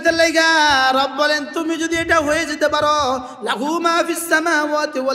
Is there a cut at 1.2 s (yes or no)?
no